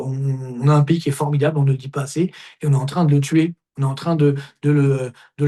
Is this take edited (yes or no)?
no